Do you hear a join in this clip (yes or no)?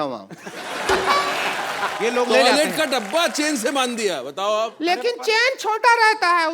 yes